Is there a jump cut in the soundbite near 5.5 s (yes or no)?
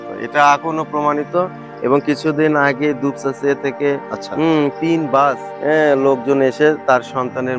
yes